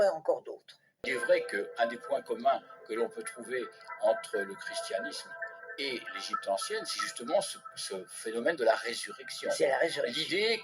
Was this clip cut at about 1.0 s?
yes; 1 cut; at 1.0 s

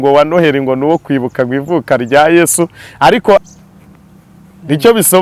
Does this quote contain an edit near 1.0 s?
no; 1 cut; at 3.4 s

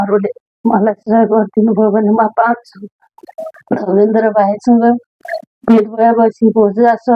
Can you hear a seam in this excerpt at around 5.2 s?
no; 1 cut; at 3.6 s

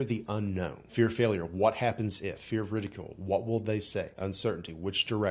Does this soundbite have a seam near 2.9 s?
no; 1 cut; at 0.9 s

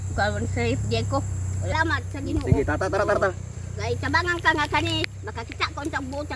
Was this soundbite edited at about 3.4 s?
no; 1 cut; at 1.7 s

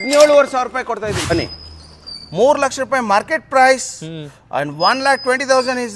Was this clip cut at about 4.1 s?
no; 1 cut; at 1.3 s

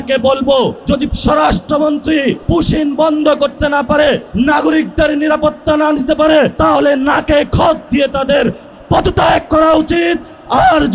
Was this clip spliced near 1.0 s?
yes; 4 cuts; at 1.0 s, 2.4 s, 4.3 s, 6.5 s

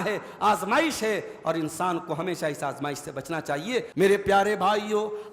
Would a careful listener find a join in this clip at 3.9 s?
yes; 1 cut; at 3.9 s

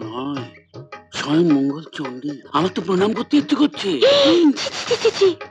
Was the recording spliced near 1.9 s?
no; 0 cuts

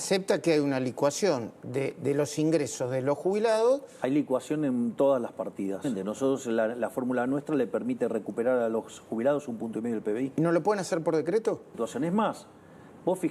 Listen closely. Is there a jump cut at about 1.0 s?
no; 2 cuts; at 5.8 s, 11.7 s

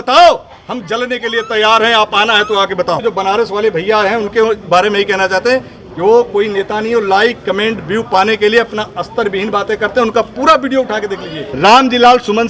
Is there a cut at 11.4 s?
yes; 2 cuts; at 3.0 s, 11.4 s

